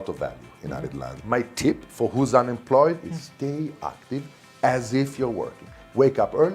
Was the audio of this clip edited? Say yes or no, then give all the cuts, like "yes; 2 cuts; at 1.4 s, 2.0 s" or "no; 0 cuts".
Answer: yes; 1 cut; at 1.1 s